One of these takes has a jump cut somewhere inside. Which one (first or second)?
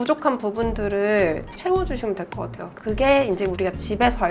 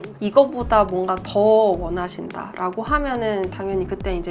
first